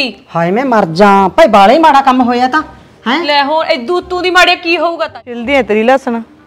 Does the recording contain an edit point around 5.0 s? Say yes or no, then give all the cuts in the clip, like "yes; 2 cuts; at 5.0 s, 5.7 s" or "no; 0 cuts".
yes; 1 cut; at 5.0 s